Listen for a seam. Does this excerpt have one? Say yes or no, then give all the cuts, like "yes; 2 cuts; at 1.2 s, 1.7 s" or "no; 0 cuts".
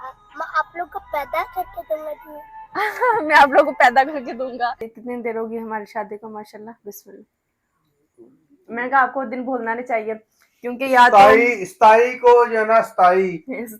yes; 1 cut; at 4.9 s